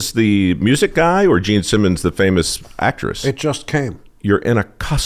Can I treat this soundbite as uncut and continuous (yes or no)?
no